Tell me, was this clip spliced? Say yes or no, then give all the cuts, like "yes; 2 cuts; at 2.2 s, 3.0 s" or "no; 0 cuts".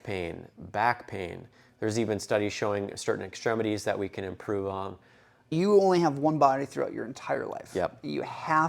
yes; 1 cut; at 5.5 s